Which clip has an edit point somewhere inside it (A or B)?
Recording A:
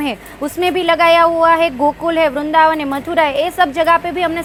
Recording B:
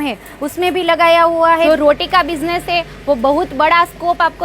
B